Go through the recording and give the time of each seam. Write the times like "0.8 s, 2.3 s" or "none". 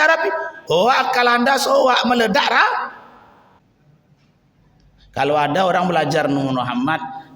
3.6 s